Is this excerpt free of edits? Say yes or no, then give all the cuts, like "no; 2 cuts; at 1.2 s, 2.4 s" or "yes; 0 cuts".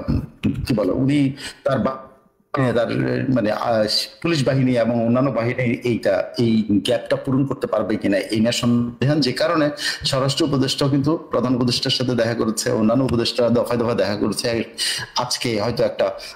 yes; 0 cuts